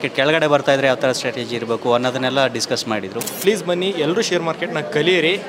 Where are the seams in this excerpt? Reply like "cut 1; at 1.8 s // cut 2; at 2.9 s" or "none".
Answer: cut 1; at 3.3 s